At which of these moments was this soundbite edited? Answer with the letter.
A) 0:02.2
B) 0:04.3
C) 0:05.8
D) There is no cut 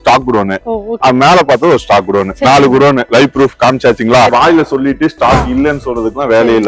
B